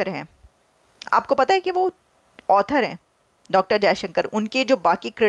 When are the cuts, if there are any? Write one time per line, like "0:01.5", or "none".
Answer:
none